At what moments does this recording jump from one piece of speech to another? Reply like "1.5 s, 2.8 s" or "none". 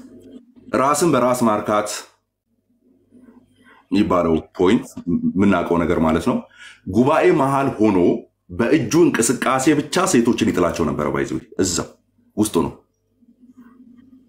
none